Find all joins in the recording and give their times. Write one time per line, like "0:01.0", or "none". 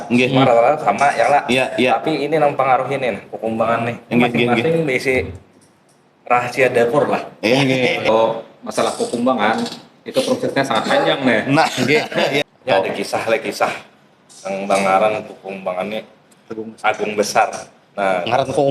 0:08.1
0:12.5